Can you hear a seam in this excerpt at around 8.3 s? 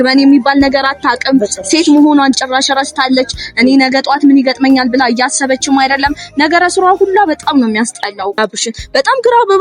yes; 1 cut; at 8.3 s

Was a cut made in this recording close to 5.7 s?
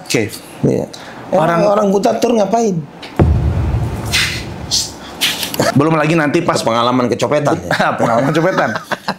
yes; 1 cut; at 5.7 s

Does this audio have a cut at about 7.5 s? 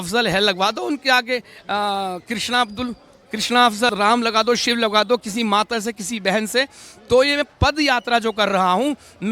no; 1 cut; at 3.9 s

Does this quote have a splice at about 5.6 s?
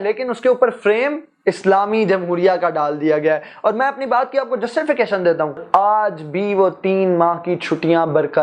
yes; 1 cut; at 5.6 s

